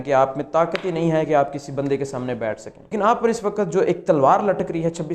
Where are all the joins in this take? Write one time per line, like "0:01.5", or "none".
0:02.9